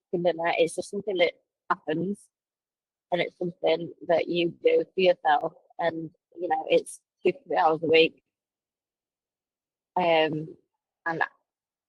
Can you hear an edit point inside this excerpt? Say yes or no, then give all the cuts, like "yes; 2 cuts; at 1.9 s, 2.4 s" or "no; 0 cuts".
no; 0 cuts